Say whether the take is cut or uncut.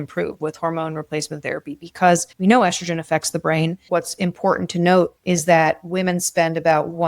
cut